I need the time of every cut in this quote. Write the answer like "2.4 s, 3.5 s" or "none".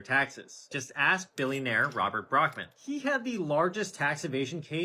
none